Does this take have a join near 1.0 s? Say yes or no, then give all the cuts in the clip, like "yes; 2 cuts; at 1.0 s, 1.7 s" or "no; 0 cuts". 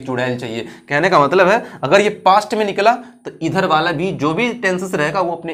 no; 0 cuts